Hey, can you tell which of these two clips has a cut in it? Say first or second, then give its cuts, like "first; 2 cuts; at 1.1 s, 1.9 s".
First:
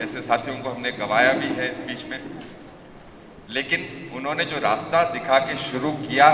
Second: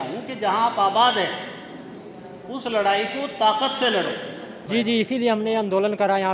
second; 1 cut; at 4.6 s